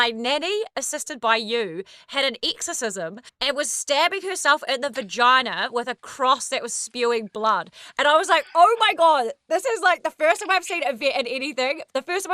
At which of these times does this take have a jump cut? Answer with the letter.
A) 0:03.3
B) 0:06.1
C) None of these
A